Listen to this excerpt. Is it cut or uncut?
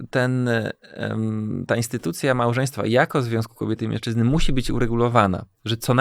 uncut